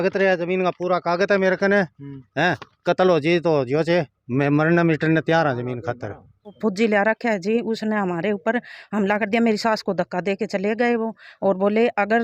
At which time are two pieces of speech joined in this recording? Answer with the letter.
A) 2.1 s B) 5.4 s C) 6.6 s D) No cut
C